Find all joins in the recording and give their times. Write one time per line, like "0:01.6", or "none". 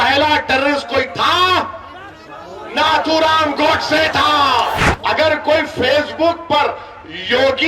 0:04.9